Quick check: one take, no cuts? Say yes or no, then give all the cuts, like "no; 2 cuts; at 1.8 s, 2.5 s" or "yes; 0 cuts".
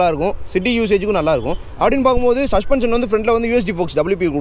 yes; 0 cuts